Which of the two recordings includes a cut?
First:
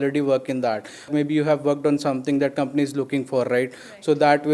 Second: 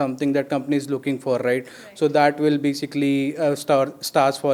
first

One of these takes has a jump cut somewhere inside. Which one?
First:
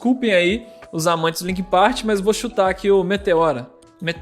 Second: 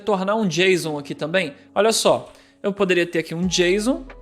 second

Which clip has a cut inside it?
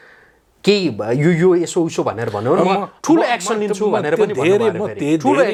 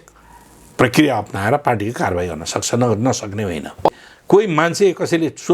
second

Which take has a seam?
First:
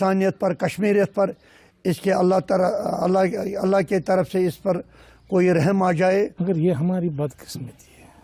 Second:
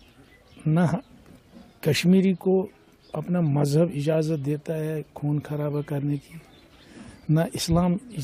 first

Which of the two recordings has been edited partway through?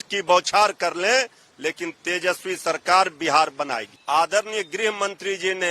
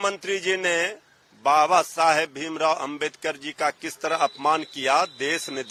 first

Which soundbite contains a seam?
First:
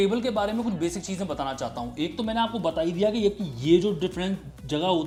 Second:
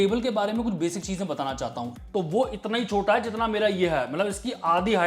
second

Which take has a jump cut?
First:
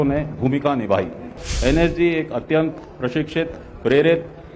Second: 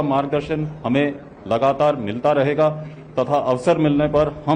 first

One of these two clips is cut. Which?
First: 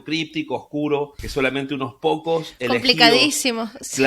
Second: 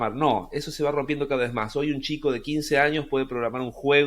first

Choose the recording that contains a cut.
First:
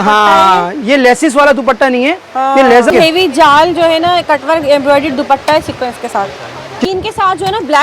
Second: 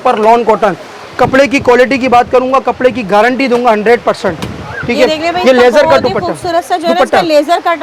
first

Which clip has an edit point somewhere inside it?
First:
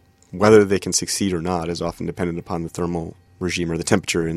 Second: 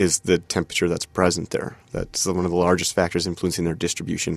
first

